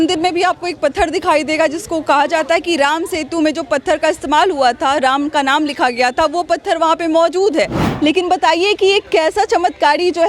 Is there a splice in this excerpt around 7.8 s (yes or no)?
yes